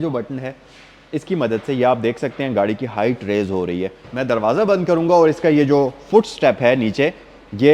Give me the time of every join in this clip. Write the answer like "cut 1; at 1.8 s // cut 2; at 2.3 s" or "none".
cut 1; at 4.0 s